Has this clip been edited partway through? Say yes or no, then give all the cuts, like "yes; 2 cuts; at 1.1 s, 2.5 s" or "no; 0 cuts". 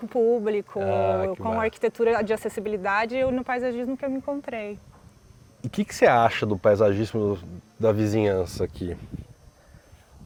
no; 0 cuts